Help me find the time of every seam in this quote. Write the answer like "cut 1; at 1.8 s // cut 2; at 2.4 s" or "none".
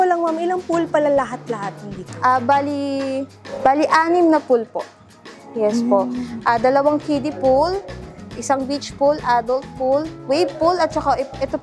none